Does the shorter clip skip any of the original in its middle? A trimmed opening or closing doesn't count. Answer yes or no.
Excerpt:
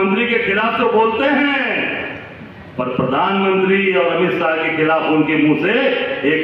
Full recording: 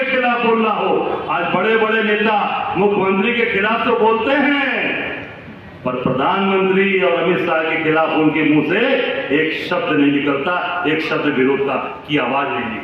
no